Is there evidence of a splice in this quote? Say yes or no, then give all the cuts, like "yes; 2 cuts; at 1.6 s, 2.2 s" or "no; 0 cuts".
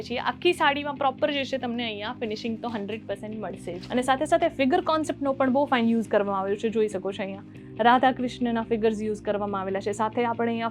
yes; 1 cut; at 3.8 s